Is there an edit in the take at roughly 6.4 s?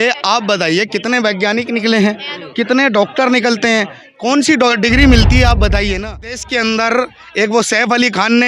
yes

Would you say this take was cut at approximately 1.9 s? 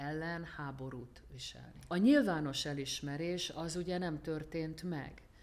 yes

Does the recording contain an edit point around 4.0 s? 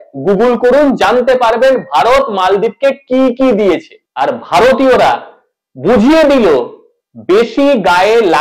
yes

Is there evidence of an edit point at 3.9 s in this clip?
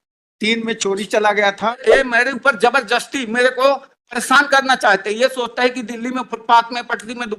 no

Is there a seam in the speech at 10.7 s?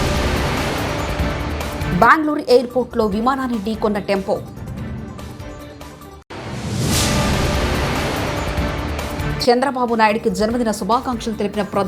no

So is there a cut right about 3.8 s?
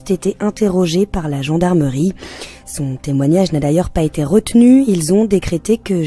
yes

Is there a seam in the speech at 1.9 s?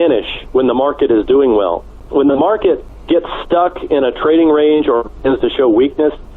yes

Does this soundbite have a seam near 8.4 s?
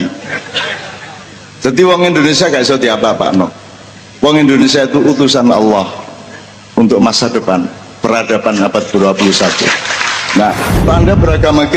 no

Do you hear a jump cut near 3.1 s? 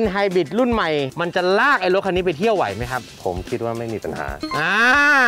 no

